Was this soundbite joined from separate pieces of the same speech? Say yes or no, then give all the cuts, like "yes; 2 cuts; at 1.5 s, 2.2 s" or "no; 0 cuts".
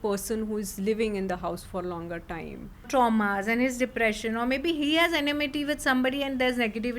yes; 1 cut; at 2.9 s